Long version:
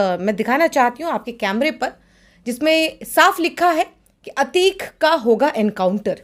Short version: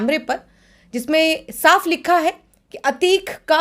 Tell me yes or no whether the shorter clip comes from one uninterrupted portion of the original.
yes